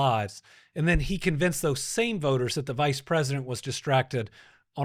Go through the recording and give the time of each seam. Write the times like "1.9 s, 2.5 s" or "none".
none